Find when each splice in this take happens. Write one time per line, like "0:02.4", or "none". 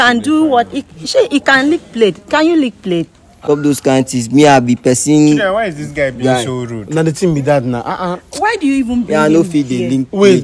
0:03.2